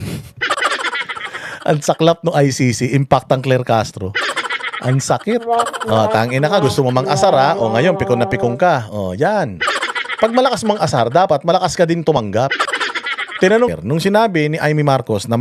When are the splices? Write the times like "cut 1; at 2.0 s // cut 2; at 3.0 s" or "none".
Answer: cut 1; at 13.7 s